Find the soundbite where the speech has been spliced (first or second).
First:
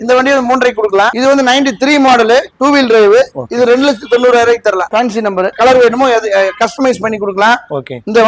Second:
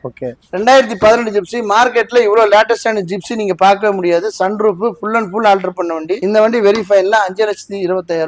first